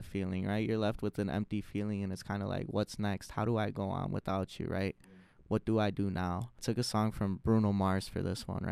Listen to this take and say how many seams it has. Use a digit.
1